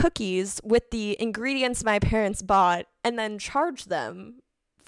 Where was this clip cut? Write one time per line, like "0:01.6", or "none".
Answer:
none

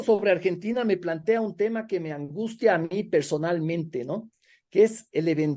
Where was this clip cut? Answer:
none

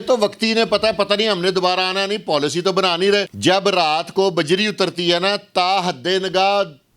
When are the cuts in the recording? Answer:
0:03.3

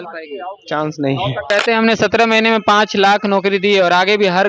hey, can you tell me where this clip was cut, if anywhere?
0:01.5

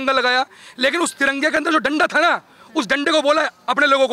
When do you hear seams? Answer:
none

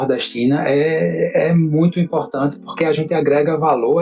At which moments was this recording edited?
none

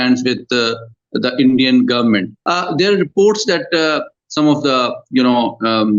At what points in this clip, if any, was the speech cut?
0:02.4

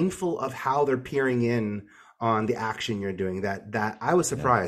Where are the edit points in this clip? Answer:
none

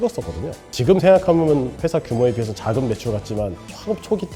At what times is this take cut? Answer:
none

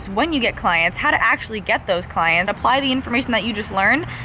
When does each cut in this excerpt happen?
0:02.5

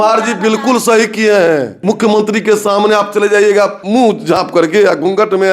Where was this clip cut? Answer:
0:01.8
0:03.8

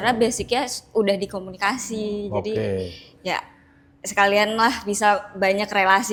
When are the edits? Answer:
none

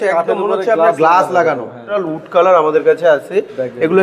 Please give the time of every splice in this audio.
0:02.0

